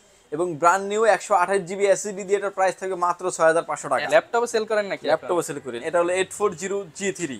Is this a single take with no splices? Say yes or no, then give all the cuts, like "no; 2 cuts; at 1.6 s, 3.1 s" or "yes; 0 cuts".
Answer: no; 2 cuts; at 4.1 s, 5.8 s